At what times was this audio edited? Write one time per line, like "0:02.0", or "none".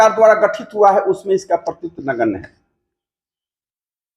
none